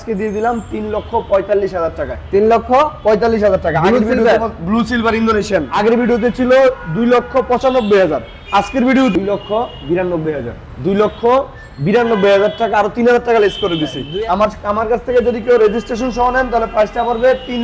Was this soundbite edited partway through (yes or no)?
yes